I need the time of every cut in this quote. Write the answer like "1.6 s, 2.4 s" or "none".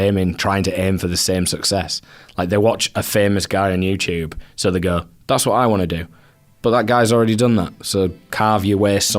8.3 s